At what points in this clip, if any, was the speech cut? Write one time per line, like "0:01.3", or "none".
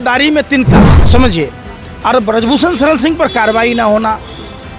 0:01.0